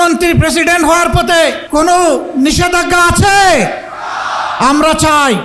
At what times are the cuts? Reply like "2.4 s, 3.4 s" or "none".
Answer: 1.6 s